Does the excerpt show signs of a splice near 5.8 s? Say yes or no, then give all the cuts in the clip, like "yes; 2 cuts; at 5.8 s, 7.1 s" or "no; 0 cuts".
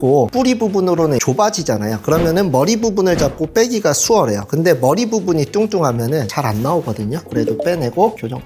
no; 1 cut; at 7.5 s